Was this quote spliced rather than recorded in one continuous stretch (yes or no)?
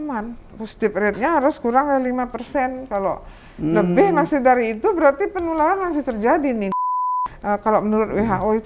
yes